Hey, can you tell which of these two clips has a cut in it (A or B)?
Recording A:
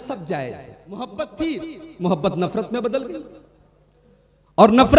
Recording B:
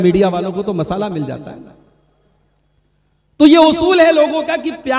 A